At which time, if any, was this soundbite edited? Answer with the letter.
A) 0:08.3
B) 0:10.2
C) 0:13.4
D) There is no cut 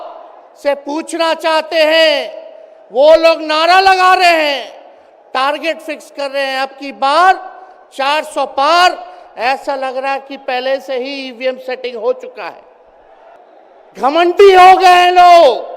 C